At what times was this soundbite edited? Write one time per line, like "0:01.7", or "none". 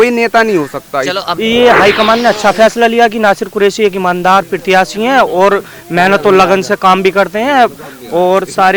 0:01.3